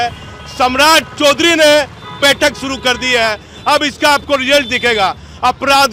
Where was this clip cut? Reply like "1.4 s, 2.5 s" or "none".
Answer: none